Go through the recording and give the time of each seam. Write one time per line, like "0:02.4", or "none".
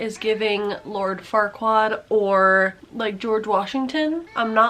none